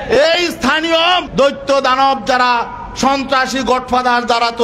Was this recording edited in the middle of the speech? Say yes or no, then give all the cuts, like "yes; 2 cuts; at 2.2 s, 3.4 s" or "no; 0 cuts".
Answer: yes; 1 cut; at 1.3 s